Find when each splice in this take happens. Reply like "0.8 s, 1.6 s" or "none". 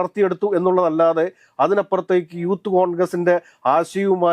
none